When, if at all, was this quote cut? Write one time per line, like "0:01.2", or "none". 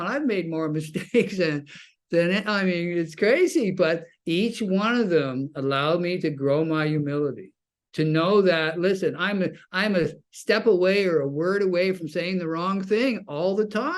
none